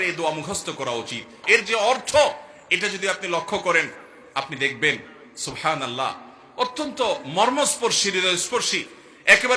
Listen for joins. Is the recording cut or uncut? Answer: cut